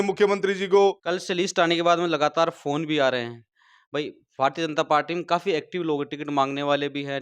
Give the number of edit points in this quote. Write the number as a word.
one